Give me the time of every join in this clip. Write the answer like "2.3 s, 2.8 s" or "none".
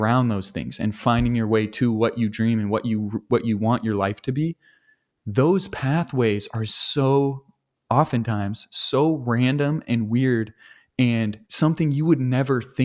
11.4 s

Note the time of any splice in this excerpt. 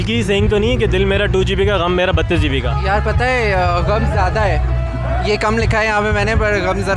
none

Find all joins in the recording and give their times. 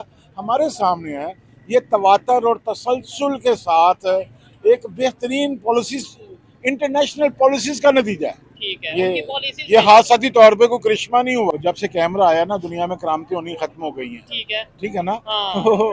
11.5 s

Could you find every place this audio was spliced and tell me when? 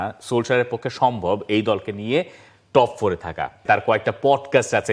3.6 s

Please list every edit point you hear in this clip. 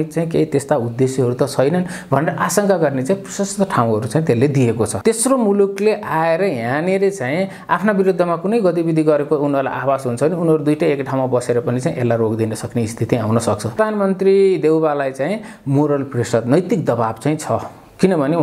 4.9 s, 13.7 s

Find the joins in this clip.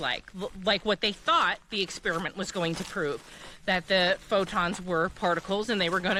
none

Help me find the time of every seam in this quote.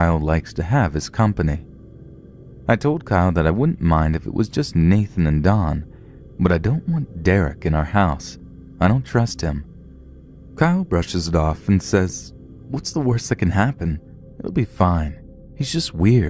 none

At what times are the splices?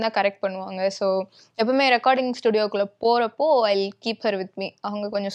none

